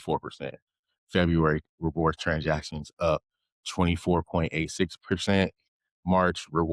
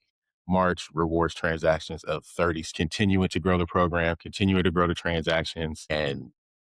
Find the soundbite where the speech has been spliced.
second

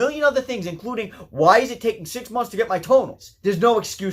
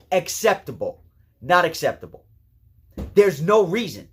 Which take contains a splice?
first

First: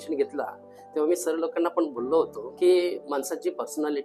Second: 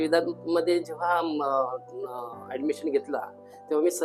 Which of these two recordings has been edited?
first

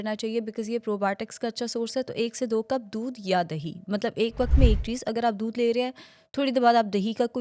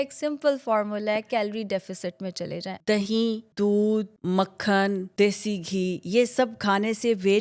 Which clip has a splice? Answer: second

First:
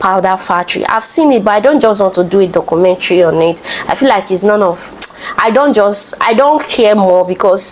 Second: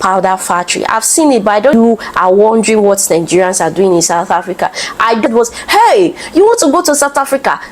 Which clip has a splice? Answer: second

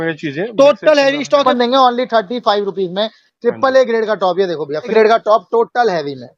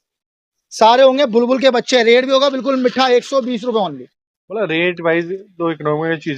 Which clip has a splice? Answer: first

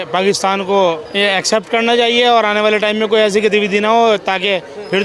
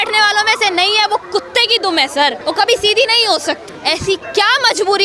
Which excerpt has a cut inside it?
second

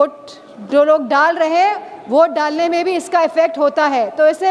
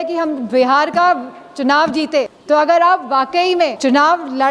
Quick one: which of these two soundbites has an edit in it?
second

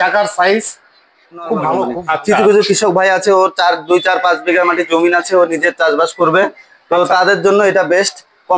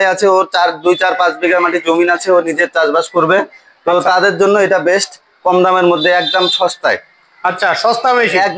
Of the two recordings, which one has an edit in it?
first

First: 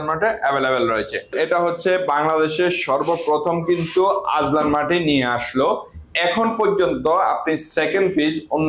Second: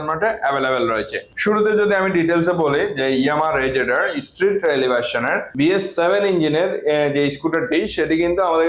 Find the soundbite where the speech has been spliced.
first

